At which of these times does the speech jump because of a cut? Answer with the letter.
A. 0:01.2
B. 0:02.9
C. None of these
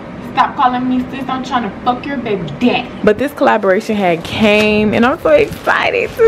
B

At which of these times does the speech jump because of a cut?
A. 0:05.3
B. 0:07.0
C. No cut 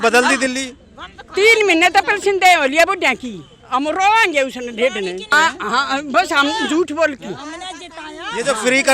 A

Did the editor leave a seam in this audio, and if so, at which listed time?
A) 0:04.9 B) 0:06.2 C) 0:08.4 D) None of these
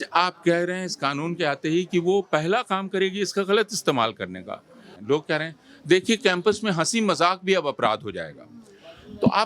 A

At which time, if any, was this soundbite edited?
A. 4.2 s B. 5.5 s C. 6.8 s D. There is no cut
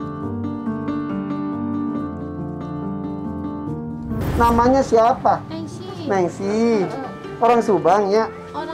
A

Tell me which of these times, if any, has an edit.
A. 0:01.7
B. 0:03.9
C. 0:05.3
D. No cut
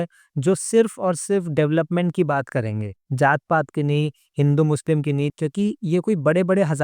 C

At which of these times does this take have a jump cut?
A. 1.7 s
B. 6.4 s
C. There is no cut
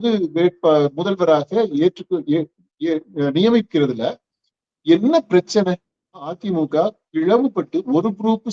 B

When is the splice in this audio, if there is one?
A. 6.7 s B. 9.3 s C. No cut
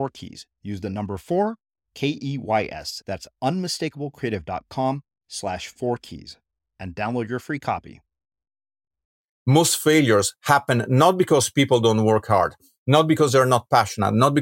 B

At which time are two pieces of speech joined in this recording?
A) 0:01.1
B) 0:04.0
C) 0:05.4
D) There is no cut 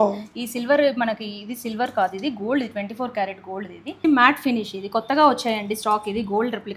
B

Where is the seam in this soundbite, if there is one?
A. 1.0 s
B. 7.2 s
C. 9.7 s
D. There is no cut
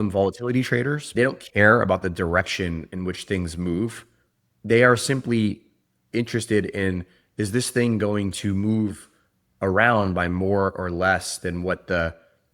A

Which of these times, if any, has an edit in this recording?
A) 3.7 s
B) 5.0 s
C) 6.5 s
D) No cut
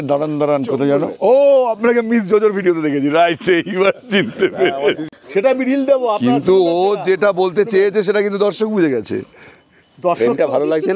B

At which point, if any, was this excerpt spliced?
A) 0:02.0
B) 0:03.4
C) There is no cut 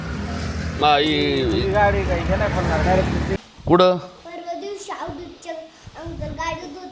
B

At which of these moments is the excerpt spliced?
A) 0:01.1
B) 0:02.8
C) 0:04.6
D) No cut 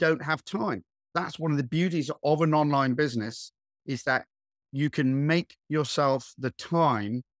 A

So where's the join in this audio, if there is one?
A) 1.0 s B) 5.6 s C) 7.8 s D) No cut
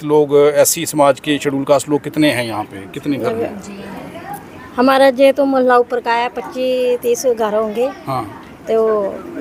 D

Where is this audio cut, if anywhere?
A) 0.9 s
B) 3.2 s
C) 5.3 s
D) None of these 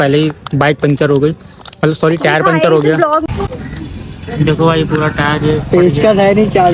B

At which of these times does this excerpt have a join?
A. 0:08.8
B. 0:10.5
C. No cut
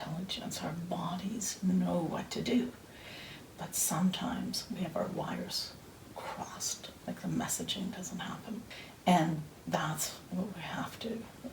A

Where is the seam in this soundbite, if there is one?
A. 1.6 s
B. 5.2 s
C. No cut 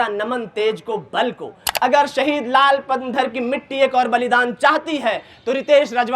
A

